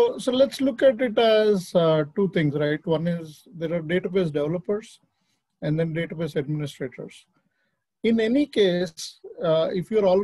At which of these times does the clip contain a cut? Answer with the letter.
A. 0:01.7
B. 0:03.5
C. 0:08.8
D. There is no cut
D